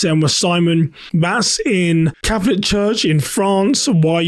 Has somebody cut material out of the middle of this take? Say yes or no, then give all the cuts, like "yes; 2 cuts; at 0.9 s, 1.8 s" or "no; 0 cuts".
yes; 2 cuts; at 1.0 s, 2.2 s